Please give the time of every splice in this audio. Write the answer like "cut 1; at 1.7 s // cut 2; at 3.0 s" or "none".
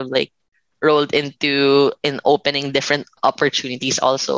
cut 1; at 3.2 s